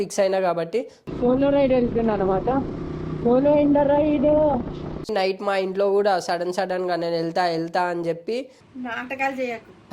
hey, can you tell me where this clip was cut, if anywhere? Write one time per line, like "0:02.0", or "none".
0:05.1